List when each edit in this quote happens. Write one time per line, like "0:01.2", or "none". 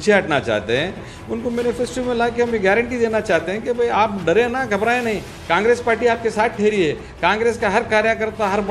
none